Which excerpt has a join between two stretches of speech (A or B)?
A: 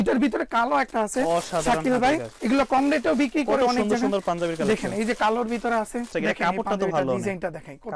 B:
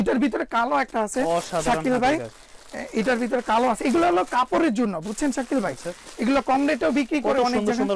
A